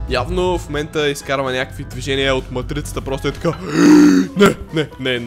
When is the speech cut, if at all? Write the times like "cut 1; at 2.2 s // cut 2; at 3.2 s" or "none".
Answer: none